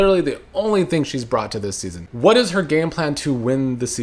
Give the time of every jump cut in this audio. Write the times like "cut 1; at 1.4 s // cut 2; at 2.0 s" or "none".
cut 1; at 2.0 s